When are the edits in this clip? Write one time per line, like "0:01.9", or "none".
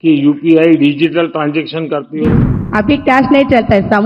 0:02.3